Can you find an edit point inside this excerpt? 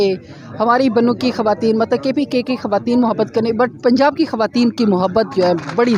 no; 0 cuts

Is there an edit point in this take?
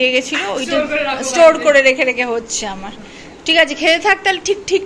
no; 0 cuts

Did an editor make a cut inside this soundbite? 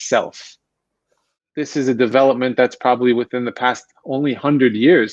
yes; 1 cut; at 1.5 s

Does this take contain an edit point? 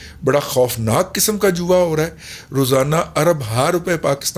no; 0 cuts

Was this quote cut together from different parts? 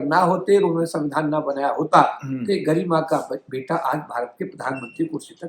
no; 0 cuts

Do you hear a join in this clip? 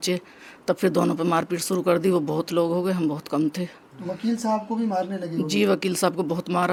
no; 0 cuts

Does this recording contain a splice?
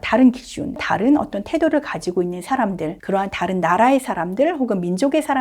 yes; 2 cuts; at 0.8 s, 3.0 s

